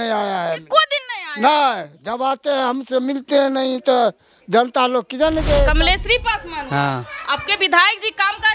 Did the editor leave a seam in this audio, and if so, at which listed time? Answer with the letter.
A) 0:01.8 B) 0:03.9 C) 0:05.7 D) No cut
C